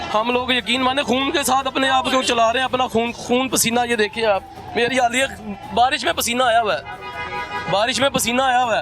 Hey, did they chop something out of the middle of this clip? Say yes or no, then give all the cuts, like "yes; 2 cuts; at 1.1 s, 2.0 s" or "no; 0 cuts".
no; 0 cuts